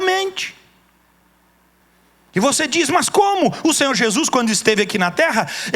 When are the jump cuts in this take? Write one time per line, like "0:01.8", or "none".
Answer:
0:01.8